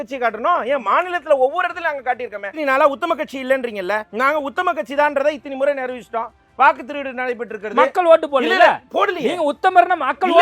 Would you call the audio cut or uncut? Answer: cut